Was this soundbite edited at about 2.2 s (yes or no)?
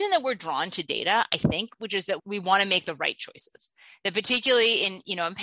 yes